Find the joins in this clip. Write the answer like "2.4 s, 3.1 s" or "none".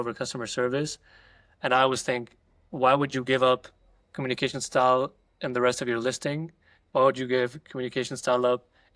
none